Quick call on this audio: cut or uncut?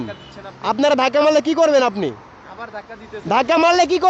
uncut